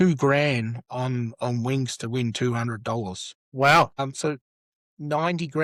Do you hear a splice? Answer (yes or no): no